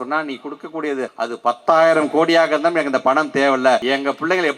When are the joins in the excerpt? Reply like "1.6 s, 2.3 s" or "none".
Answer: 1.1 s, 3.8 s

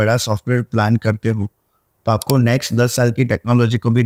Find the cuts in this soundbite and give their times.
none

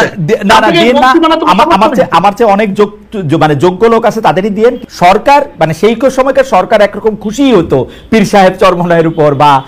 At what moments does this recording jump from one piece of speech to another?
4.8 s

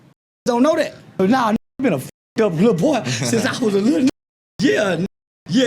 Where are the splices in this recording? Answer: 1.2 s

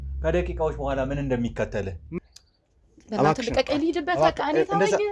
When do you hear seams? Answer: 2.2 s

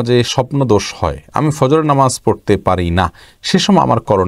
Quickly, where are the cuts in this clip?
none

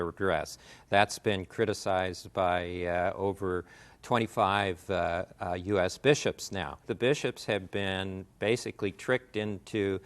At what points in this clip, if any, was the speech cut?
6.8 s

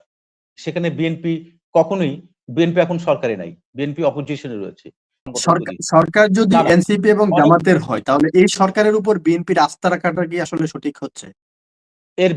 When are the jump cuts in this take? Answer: 5.3 s

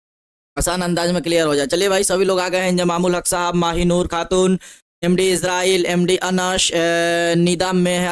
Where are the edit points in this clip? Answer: 4.4 s

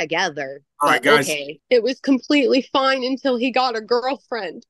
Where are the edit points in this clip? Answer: 1.6 s

